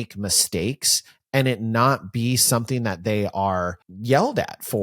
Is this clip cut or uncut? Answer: cut